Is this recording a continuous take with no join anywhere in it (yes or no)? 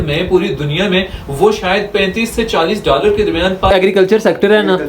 no